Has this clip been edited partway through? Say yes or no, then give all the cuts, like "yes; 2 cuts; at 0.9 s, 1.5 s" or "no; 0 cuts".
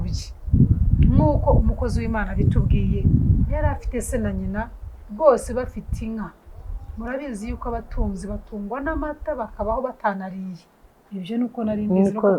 no; 0 cuts